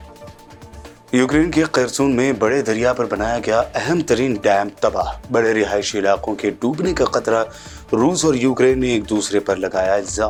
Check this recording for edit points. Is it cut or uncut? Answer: uncut